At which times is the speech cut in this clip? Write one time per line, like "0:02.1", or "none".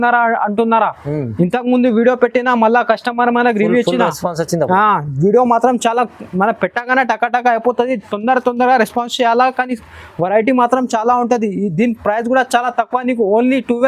none